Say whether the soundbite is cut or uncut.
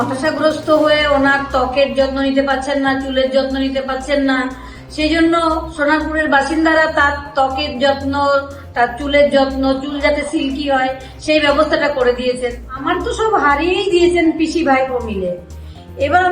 cut